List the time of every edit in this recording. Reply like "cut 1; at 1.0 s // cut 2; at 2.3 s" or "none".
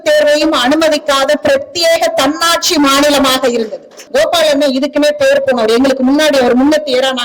cut 1; at 4.0 s